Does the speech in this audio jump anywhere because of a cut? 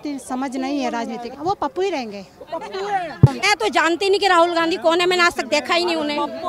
yes; 2 cuts; at 1.3 s, 3.5 s

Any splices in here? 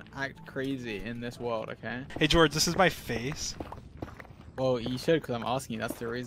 yes; 1 cut; at 2.1 s

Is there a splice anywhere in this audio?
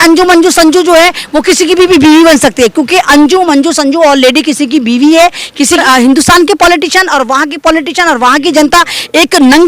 yes; 1 cut; at 5.8 s

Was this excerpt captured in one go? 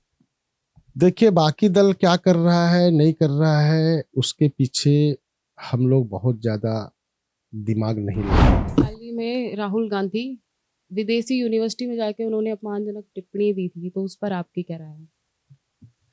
no; 1 cut; at 8.6 s

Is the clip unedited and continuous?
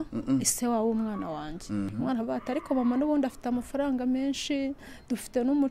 no; 1 cut; at 1.9 s

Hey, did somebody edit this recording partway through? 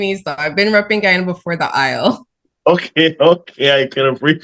no; 0 cuts

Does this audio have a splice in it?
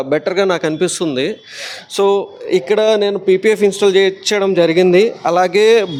no; 0 cuts

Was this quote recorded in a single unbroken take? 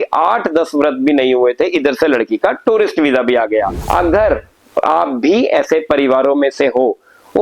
no; 1 cut; at 3.8 s

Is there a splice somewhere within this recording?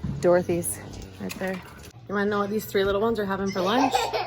yes; 1 cut; at 1.9 s

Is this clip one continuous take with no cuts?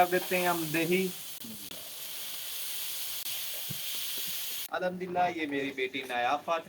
no; 3 cuts; at 1.3 s, 3.3 s, 4.6 s

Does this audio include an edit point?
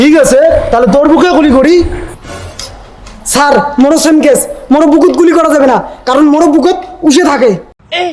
no; 0 cuts

